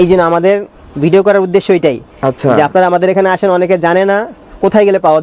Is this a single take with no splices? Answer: yes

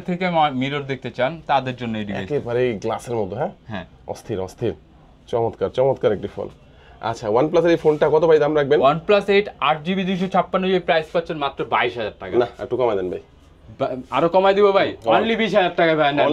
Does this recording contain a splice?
no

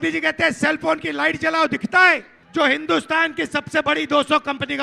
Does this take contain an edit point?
yes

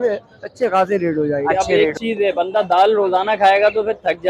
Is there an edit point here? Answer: yes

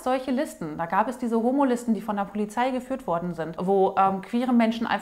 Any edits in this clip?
yes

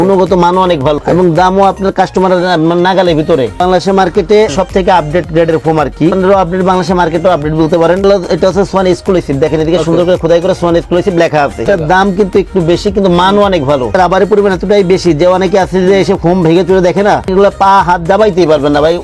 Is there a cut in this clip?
yes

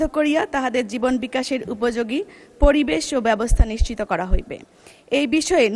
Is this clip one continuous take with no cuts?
yes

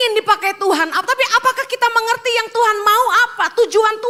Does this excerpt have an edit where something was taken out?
no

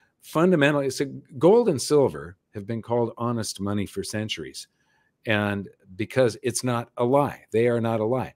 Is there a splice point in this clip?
no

